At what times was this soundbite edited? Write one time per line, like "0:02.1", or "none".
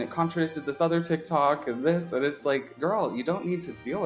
0:02.7